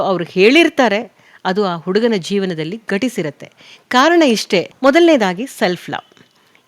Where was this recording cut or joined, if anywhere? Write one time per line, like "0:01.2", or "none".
0:04.7